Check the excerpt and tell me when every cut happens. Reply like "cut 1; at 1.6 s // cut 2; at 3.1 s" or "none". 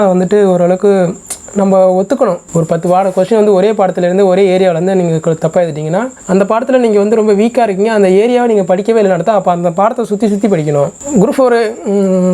cut 1; at 2.4 s // cut 2; at 6.2 s // cut 3; at 11.0 s